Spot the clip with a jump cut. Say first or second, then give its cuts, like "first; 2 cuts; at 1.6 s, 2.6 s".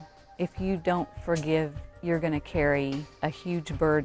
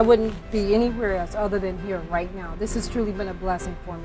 first; 2 cuts; at 1.9 s, 3.1 s